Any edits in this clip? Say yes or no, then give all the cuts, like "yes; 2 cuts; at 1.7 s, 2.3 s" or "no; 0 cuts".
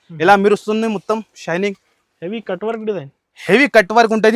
no; 0 cuts